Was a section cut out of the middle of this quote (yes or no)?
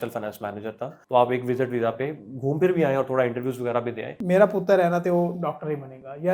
yes